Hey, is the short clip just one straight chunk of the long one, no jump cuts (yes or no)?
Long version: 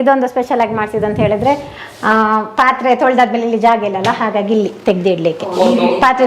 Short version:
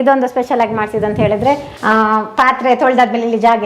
no